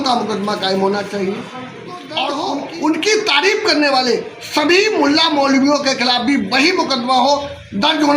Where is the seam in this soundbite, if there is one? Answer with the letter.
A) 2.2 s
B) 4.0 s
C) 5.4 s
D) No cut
A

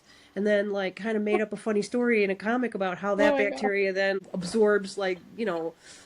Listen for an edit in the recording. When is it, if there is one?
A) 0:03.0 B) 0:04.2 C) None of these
B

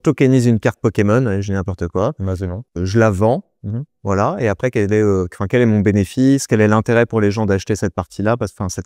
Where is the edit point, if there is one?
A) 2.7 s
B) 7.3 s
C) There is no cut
A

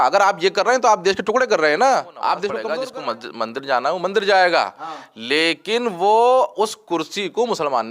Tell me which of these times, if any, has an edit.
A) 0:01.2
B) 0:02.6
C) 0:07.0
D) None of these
B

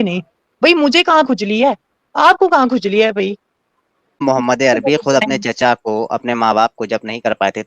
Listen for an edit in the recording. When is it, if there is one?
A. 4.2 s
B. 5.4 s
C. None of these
A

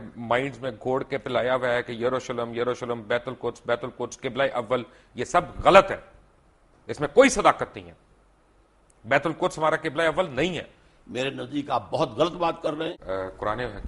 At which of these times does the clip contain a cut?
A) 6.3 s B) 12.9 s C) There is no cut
B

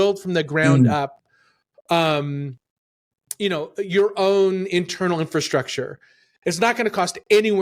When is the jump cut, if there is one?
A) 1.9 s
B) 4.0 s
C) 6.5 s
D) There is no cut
D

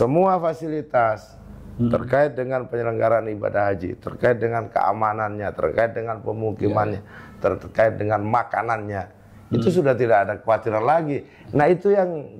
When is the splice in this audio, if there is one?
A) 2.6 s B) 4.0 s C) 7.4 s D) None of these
D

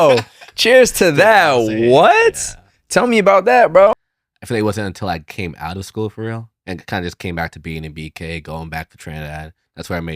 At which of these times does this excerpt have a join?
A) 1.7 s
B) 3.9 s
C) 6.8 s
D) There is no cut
B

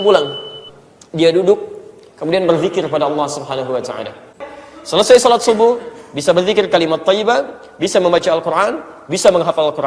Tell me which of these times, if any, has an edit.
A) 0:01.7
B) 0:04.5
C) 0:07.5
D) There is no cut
B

